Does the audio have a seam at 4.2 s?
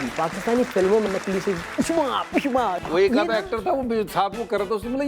no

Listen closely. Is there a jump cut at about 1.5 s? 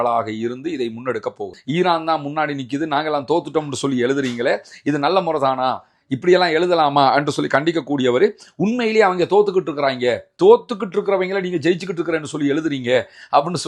yes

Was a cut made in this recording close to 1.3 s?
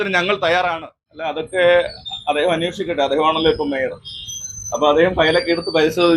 yes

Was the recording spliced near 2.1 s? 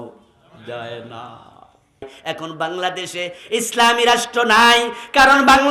yes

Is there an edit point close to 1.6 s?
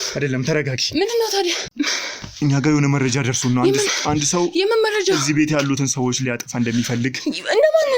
yes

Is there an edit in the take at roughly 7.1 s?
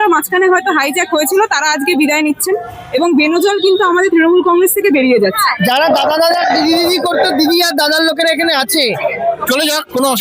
no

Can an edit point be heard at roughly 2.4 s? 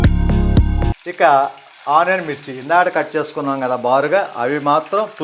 no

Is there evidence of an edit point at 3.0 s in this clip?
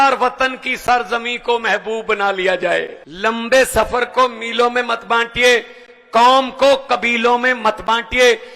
yes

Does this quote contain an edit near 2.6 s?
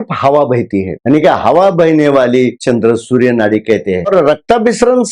yes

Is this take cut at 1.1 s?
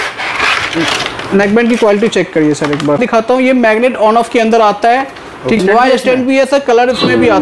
no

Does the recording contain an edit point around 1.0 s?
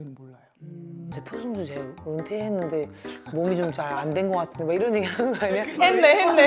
yes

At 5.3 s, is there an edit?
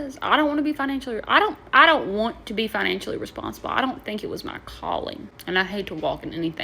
yes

